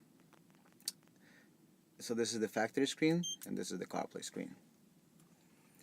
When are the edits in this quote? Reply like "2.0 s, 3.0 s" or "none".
none